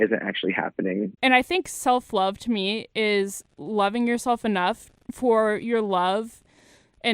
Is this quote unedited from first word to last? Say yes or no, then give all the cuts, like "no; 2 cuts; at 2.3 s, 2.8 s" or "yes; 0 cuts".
no; 1 cut; at 1.1 s